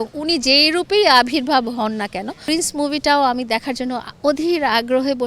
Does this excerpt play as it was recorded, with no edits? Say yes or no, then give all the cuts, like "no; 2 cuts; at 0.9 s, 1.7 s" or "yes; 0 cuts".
no; 1 cut; at 2.4 s